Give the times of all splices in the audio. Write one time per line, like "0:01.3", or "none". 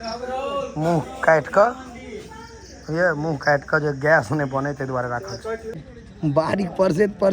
0:05.9